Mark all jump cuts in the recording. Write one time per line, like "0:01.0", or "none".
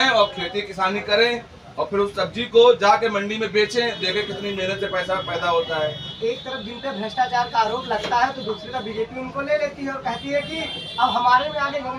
0:06.1